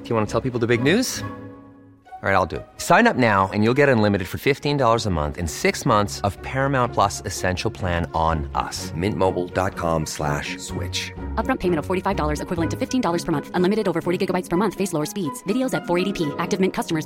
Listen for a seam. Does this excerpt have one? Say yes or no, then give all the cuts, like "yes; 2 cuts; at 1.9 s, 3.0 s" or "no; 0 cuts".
no; 0 cuts